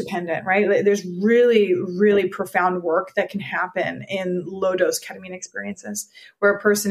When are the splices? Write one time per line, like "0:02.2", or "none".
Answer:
none